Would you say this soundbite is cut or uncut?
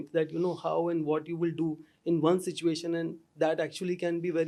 uncut